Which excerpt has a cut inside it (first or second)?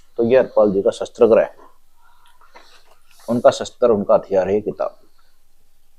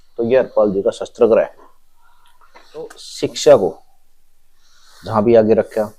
second